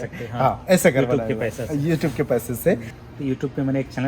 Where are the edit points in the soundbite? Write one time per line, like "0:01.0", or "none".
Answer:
0:02.9